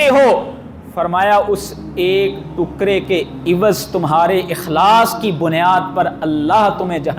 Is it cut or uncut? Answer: uncut